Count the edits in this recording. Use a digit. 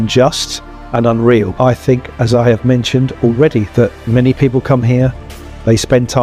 0